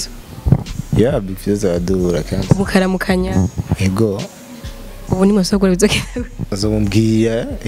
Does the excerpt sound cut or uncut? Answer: cut